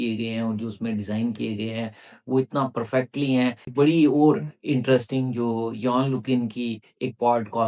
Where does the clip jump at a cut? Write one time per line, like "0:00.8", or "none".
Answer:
0:03.7

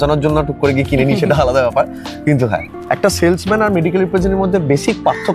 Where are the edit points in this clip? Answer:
0:02.7

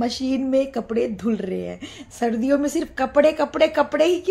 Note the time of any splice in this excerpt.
none

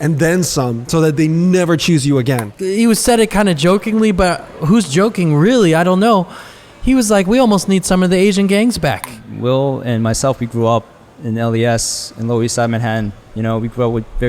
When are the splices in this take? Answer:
0:02.5
0:09.3

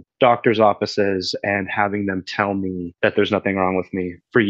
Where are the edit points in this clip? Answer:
none

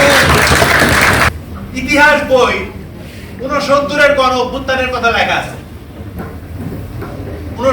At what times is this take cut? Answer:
0:01.3

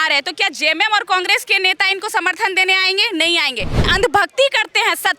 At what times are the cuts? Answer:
0:03.9

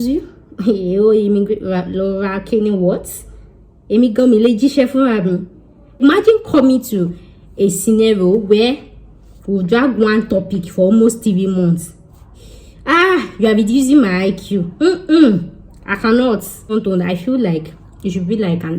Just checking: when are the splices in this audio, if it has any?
0:06.0
0:16.7

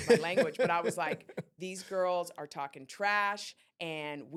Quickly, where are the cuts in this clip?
none

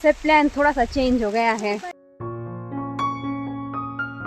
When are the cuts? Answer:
none

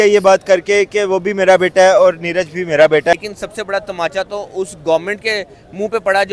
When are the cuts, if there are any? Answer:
0:03.1

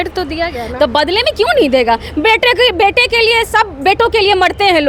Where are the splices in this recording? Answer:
none

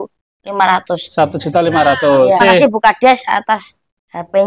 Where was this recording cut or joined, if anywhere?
0:02.4

